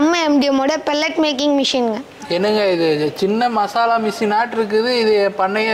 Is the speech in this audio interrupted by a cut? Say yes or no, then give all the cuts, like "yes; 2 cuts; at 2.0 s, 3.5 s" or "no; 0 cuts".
no; 0 cuts